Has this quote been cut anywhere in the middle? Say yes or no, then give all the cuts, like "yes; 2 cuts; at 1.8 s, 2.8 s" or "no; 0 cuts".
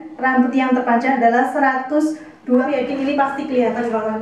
yes; 1 cut; at 2.6 s